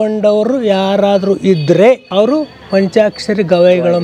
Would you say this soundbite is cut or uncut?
cut